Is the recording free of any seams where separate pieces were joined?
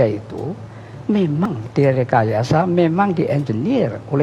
no; 1 cut; at 1.5 s

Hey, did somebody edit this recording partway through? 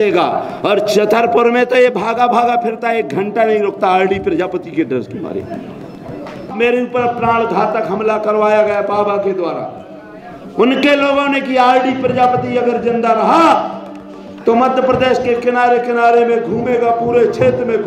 yes; 1 cut; at 6.5 s

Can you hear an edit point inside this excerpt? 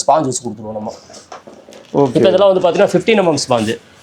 no; 0 cuts

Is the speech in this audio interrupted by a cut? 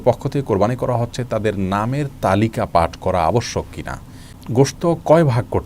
yes; 1 cut; at 4.3 s

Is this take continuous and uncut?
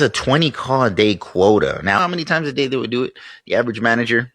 no; 1 cut; at 2.0 s

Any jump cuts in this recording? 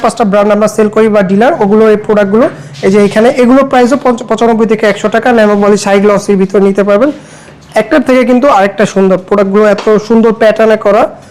no; 0 cuts

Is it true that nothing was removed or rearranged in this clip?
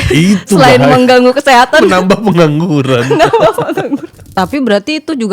no; 1 cut; at 4.2 s

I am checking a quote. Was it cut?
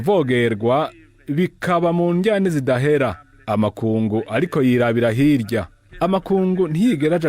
yes; 1 cut; at 5.8 s

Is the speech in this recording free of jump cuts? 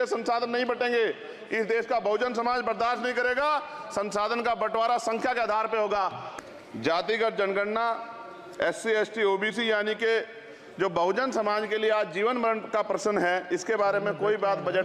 no; 1 cut; at 6.3 s

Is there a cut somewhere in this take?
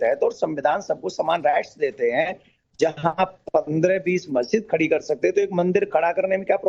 no; 0 cuts

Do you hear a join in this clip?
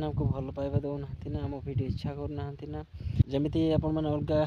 yes; 1 cut; at 3.3 s

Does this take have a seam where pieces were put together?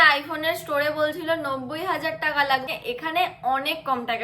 yes; 1 cut; at 2.7 s

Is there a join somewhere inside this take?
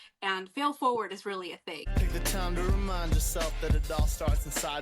yes; 1 cut; at 1.8 s

